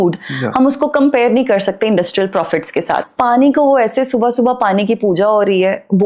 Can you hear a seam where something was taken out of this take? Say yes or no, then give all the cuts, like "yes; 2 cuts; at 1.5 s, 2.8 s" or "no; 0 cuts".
yes; 1 cut; at 3.1 s